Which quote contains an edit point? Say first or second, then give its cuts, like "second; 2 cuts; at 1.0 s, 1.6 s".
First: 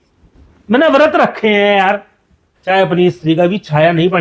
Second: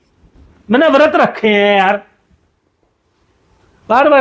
first; 1 cut; at 2.5 s